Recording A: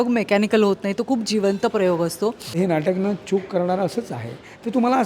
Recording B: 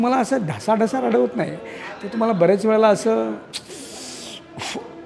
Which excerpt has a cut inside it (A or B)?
A